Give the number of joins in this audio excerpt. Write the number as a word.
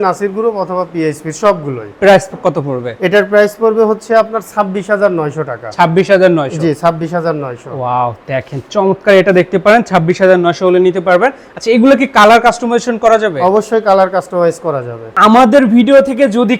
zero